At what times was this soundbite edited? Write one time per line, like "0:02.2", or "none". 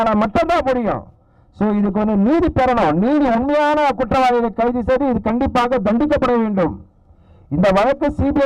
none